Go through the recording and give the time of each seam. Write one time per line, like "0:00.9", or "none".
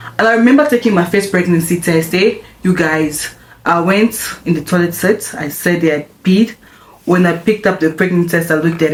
none